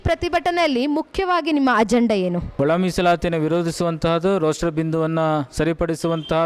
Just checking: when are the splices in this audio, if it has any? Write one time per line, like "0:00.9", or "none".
0:02.5